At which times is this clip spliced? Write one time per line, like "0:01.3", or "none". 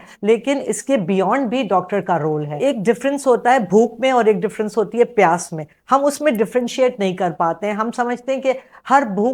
0:02.5